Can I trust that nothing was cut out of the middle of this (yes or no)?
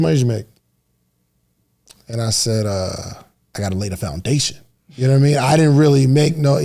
no